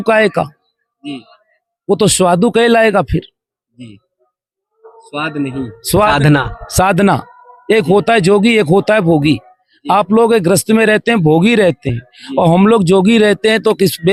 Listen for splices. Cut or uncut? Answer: uncut